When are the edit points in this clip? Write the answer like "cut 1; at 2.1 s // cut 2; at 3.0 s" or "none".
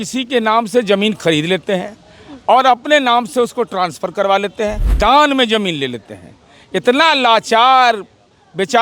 cut 1; at 4.8 s